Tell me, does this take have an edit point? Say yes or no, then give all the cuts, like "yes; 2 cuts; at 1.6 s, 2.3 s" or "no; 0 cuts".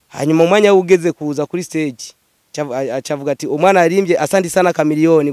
no; 0 cuts